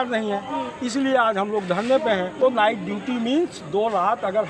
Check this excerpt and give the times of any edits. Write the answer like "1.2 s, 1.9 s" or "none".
2.4 s